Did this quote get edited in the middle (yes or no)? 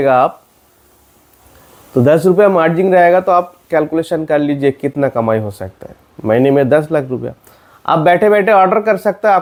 no